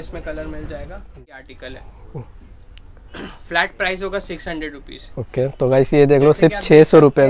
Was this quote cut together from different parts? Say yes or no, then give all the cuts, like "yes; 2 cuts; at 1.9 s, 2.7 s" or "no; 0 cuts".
yes; 1 cut; at 1.2 s